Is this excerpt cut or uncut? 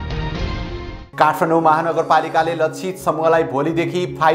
cut